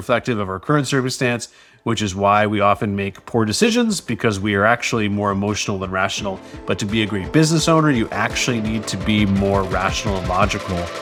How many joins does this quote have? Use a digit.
0